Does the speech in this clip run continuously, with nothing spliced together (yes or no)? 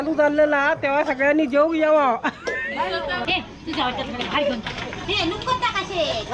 no